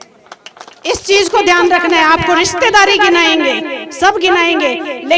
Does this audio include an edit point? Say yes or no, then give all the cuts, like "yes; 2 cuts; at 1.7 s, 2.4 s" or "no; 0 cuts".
no; 0 cuts